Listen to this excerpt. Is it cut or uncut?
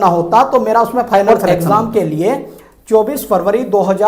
cut